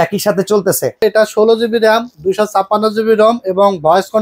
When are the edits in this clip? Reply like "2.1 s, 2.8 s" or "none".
1.0 s